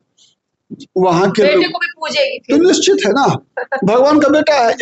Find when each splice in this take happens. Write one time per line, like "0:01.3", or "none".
none